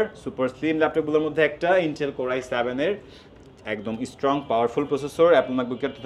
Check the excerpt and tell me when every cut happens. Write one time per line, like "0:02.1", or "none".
none